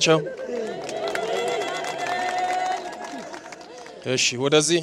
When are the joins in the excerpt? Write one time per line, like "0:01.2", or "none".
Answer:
none